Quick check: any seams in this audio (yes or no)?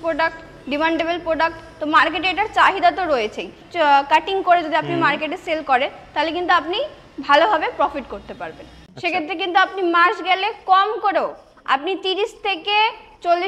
yes